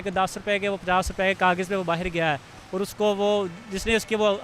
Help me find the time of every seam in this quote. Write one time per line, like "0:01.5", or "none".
none